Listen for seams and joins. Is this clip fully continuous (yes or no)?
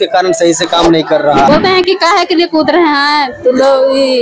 no